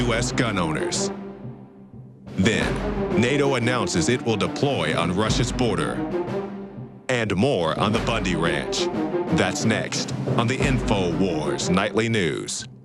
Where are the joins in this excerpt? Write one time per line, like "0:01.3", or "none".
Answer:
0:05.7